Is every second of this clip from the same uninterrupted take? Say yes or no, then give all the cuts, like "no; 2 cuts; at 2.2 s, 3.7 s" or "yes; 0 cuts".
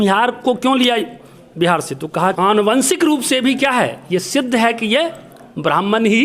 no; 1 cut; at 2.4 s